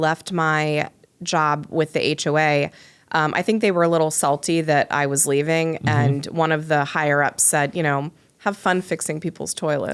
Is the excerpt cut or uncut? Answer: uncut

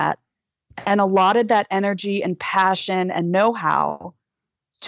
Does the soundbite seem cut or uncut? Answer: uncut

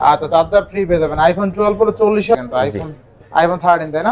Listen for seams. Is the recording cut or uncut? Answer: cut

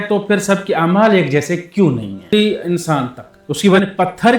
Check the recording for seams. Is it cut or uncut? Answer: cut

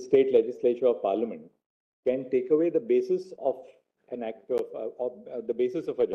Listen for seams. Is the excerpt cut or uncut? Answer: uncut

